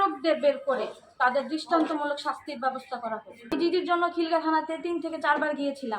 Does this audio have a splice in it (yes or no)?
yes